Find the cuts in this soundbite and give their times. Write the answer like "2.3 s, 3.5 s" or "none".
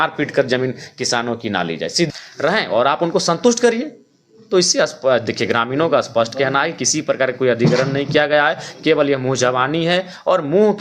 2.1 s